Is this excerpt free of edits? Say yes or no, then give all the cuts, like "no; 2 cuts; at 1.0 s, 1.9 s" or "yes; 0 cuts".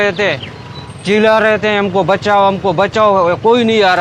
yes; 0 cuts